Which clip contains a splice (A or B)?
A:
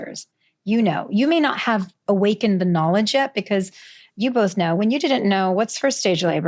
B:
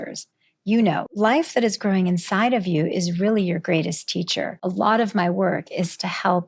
B